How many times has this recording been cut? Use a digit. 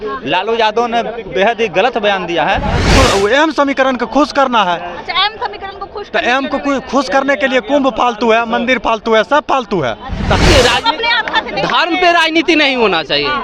2